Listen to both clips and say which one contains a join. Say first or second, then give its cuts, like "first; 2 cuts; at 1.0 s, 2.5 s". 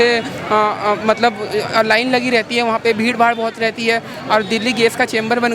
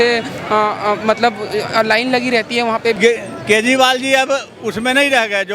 second; 1 cut; at 3.0 s